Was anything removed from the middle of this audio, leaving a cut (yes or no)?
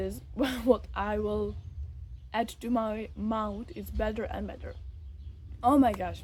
no